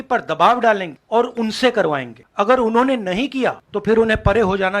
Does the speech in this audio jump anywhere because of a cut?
yes; 3 cuts; at 0.9 s, 2.2 s, 3.7 s

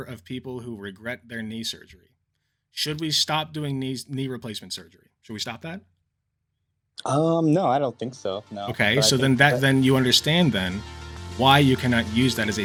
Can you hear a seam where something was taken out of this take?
no; 0 cuts

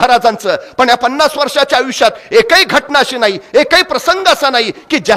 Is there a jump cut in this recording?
no; 0 cuts

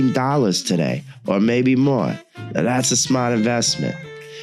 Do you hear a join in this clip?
no; 0 cuts

